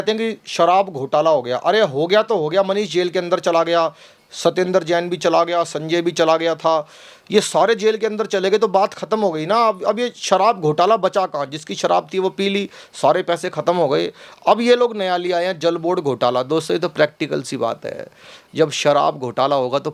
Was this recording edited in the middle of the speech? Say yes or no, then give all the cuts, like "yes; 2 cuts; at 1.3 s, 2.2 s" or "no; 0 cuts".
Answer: no; 0 cuts